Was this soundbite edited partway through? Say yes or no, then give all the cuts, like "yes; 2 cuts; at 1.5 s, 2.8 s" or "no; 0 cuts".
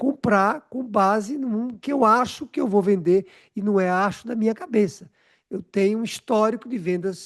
no; 0 cuts